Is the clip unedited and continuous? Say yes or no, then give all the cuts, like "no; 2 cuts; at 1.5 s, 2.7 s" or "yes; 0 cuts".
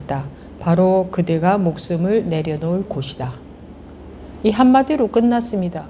no; 1 cut; at 2.9 s